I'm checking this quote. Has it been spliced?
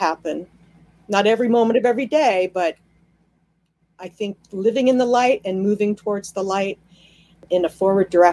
yes; 1 cut; at 7.4 s

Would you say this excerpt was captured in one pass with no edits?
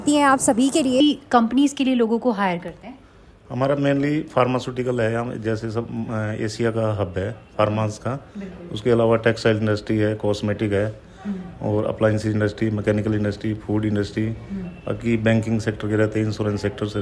no; 1 cut; at 1.0 s

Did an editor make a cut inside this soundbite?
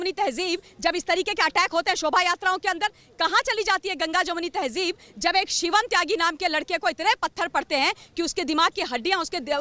no; 0 cuts

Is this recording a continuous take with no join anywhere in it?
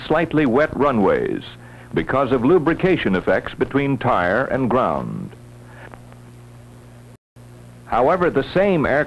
yes; 0 cuts

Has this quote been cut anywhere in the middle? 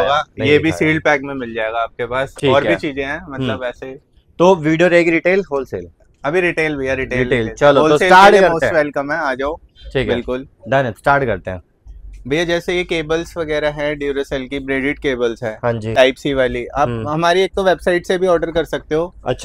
no; 0 cuts

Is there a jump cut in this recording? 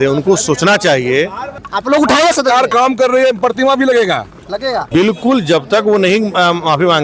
yes; 2 cuts; at 1.7 s, 4.8 s

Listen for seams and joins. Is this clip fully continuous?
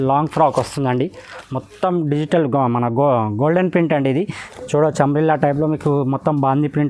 no; 1 cut; at 4.4 s

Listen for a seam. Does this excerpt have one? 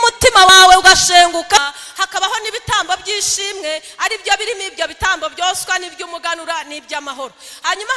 yes; 1 cut; at 1.6 s

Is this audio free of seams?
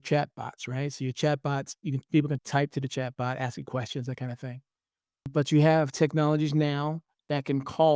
no; 1 cut; at 2.4 s

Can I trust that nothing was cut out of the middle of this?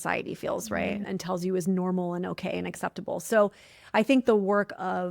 no; 1 cut; at 1.0 s

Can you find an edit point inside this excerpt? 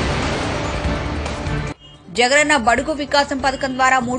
yes; 1 cut; at 1.9 s

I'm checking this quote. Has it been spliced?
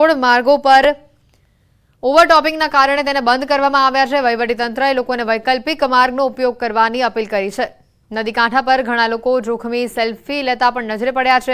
yes; 1 cut; at 6.3 s

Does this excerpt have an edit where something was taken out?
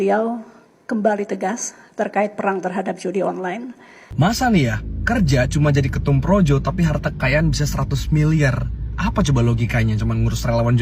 yes; 1 cut; at 4.1 s

